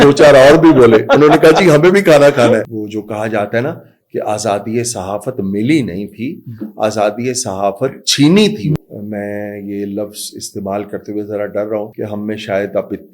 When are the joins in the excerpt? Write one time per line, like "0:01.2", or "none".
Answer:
0:02.8
0:08.8
0:11.9

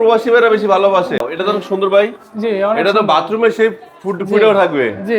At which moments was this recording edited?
0:01.2

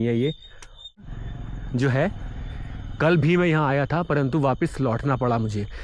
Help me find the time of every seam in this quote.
0:01.0

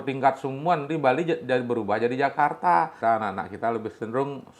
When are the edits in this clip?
0:02.9

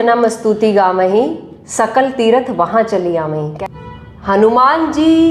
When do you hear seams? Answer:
0:03.5

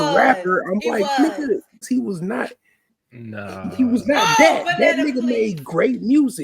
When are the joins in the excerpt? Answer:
0:01.8

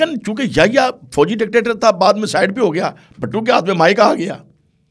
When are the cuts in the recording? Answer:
none

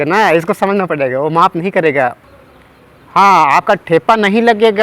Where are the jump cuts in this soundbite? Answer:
0:02.3

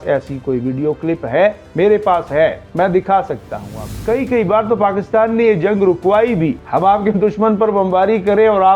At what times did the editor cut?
0:03.9
0:06.6

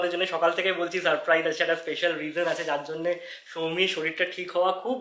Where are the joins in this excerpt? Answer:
none

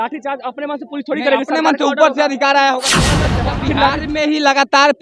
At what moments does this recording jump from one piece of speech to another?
0:03.3

